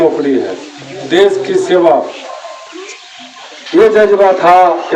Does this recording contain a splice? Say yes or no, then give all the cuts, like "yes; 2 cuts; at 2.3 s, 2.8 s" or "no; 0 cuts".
no; 0 cuts